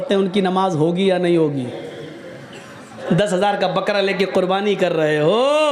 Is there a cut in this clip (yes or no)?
yes